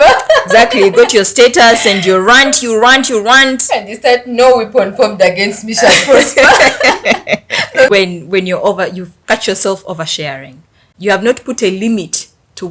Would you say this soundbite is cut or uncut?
cut